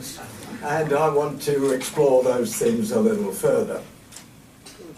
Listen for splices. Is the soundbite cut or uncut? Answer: cut